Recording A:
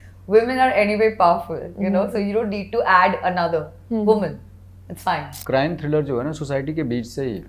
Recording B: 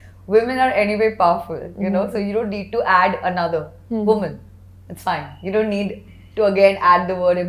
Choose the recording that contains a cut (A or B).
A